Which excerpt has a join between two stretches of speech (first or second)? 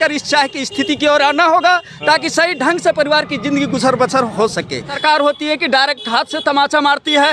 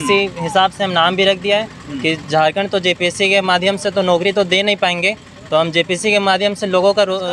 first